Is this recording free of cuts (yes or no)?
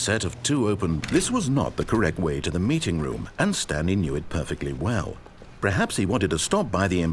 no